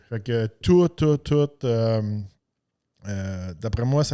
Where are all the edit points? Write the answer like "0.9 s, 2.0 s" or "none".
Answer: none